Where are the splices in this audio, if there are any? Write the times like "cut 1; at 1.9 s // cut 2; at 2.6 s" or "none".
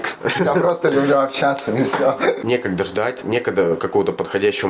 cut 1; at 2.4 s